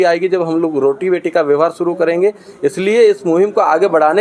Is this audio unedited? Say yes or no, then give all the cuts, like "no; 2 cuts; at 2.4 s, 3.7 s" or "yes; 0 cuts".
yes; 0 cuts